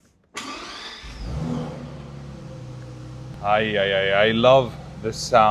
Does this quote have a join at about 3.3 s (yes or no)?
yes